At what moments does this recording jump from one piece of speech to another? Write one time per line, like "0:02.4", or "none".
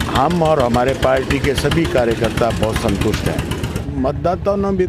0:03.8